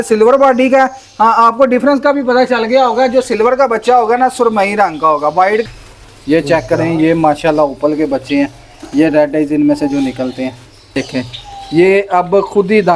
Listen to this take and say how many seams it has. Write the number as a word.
two